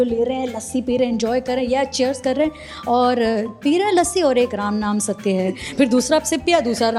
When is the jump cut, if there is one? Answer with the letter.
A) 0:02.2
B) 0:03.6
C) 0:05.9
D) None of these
D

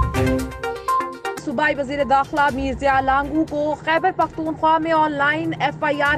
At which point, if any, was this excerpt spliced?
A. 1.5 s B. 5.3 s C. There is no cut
A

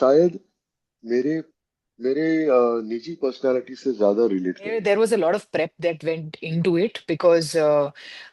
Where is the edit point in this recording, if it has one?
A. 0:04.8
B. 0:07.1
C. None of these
A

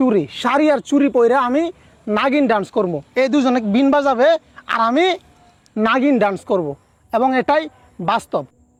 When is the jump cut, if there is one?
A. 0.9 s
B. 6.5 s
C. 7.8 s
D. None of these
D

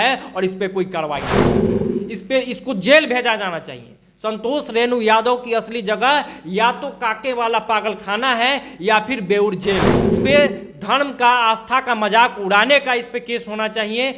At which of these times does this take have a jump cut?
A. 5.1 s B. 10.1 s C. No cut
B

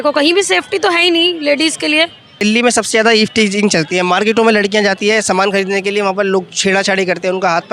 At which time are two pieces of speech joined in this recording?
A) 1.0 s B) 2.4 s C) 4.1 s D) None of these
B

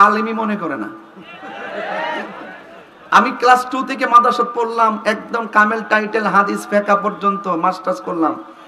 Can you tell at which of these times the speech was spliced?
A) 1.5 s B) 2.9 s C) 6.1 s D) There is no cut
D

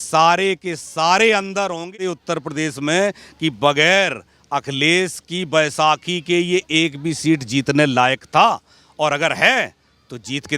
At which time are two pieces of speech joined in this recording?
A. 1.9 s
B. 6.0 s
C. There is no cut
A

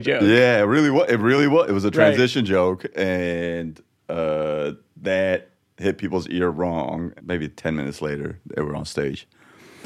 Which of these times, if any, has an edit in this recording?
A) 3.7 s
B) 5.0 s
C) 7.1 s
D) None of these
C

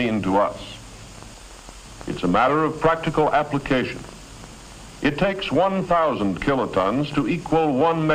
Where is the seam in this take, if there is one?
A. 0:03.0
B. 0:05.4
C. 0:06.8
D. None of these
C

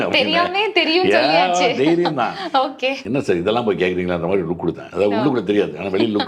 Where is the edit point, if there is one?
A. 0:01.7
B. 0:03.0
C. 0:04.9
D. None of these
B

